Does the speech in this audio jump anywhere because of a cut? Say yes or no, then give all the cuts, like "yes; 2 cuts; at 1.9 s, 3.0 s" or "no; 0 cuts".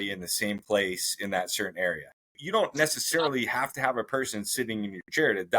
yes; 1 cut; at 2.3 s